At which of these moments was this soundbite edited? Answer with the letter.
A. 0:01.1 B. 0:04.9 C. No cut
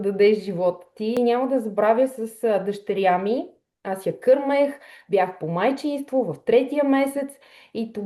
A